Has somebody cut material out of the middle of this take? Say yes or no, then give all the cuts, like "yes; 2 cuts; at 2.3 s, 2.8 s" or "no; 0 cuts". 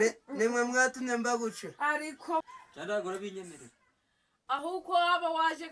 yes; 1 cut; at 2.4 s